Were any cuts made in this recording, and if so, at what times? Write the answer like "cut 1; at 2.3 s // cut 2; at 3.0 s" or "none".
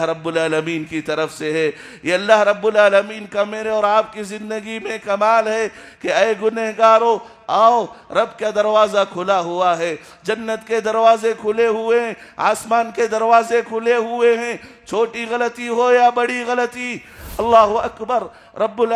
cut 1; at 17.2 s